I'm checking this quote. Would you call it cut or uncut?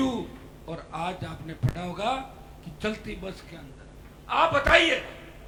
uncut